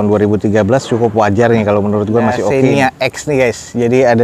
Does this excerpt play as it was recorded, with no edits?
no; 1 cut; at 2.5 s

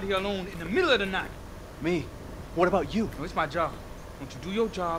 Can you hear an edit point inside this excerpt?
no; 0 cuts

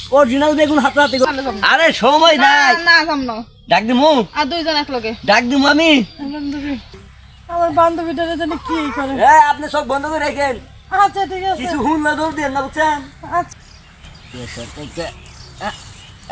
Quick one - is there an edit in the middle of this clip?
yes; 3 cuts; at 1.2 s, 6.9 s, 13.5 s

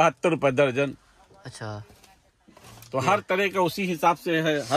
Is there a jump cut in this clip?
no; 0 cuts

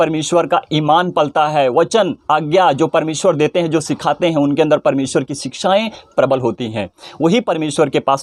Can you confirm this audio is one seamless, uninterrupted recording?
yes; 0 cuts

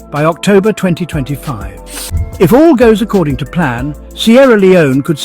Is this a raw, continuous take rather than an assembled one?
no; 1 cut; at 2.2 s

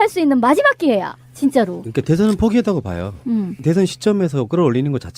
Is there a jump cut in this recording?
yes; 1 cut; at 1.4 s

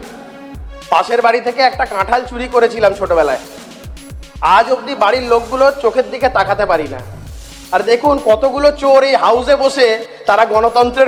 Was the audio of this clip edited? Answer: no; 0 cuts

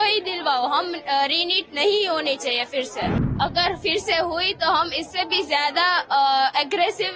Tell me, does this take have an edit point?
yes; 1 cut; at 3.4 s

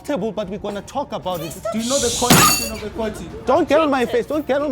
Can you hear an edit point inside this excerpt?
no; 0 cuts

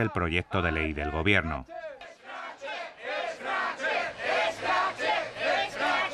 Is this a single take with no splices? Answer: yes; 0 cuts

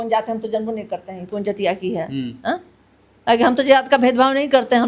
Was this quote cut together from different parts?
no; 0 cuts

